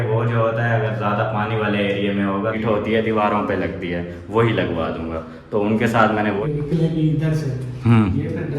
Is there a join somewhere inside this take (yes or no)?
yes